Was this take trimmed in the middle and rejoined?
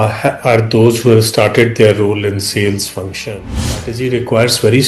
yes; 1 cut; at 3.7 s

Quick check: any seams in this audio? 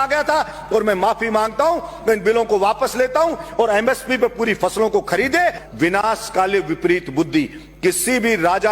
yes; 1 cut; at 5.6 s

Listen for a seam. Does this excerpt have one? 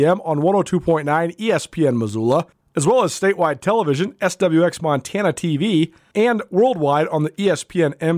yes; 2 cuts; at 2.6 s, 6.0 s

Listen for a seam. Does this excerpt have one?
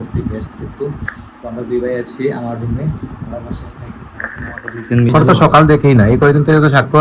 yes; 1 cut; at 5.1 s

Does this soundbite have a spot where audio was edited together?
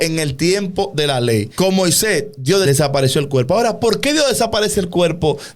yes; 2 cuts; at 1.5 s, 2.6 s

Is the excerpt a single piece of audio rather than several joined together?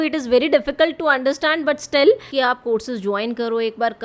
no; 1 cut; at 2.3 s

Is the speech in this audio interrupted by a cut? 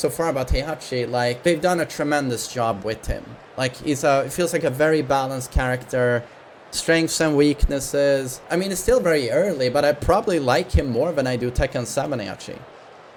no; 0 cuts

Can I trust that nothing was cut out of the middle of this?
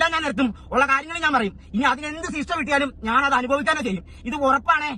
yes; 0 cuts

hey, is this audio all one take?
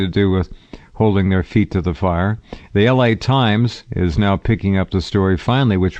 no; 1 cut; at 2.5 s

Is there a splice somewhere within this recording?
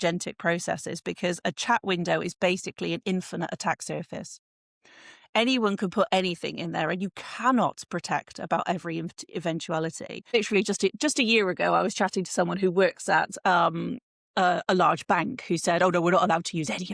yes; 1 cut; at 10.3 s

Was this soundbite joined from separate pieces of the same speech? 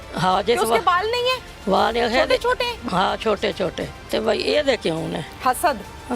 yes; 2 cuts; at 3.9 s, 5.3 s

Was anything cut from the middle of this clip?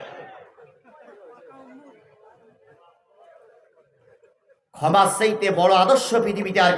no; 0 cuts

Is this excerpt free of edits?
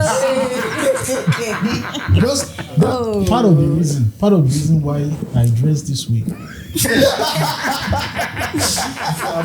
no; 1 cut; at 2.8 s

